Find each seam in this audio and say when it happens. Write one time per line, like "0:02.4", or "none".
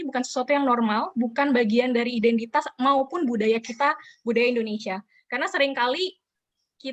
none